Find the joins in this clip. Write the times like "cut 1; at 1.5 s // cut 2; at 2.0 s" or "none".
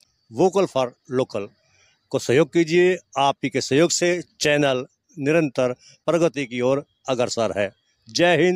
none